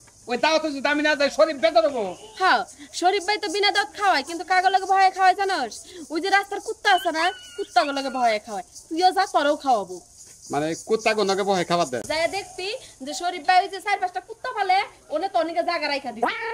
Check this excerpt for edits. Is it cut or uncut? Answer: cut